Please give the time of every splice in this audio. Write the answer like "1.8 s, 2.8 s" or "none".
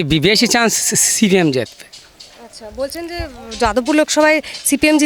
none